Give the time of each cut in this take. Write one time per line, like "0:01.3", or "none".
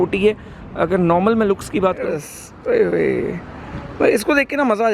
0:02.1